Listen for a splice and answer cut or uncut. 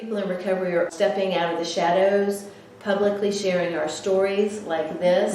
cut